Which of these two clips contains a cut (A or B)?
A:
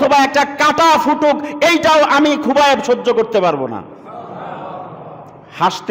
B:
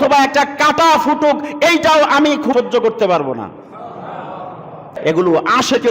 B